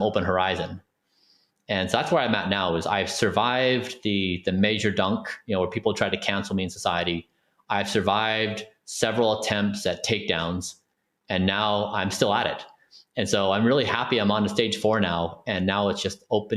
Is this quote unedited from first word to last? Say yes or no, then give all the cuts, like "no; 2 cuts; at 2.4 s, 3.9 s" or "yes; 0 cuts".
yes; 0 cuts